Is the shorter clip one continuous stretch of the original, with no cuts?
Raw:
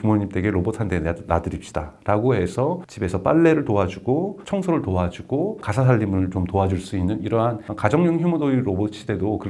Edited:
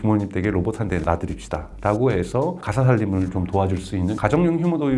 no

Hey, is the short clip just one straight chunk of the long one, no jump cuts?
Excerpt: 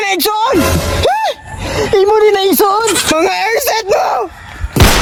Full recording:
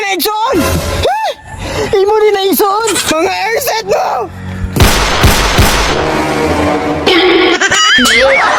yes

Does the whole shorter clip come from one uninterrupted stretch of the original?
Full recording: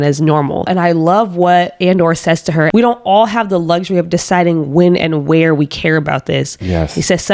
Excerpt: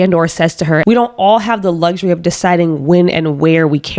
yes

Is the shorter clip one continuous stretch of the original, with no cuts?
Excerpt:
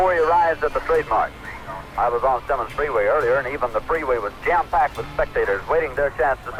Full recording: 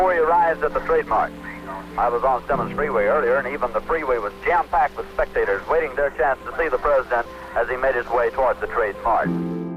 yes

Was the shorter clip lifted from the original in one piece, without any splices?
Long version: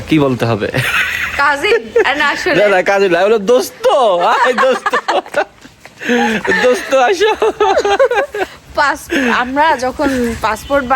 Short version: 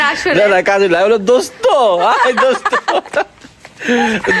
yes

